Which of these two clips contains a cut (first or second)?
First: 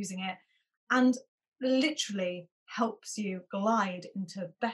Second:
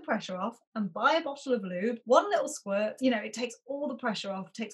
second